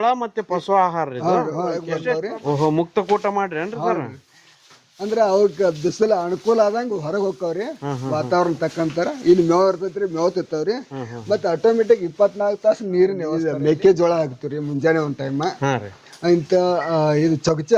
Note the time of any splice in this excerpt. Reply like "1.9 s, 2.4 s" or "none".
1.8 s, 13.5 s